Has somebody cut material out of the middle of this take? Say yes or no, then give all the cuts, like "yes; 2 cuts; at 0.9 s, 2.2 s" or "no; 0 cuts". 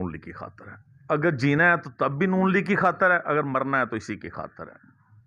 no; 0 cuts